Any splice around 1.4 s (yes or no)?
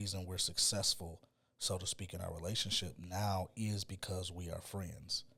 no